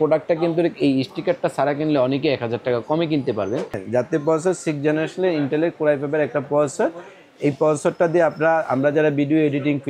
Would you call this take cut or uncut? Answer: cut